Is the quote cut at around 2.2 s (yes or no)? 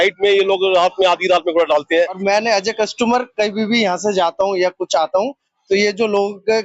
yes